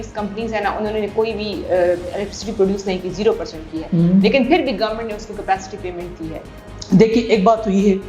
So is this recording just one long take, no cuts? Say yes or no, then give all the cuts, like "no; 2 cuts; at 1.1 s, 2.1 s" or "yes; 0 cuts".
yes; 0 cuts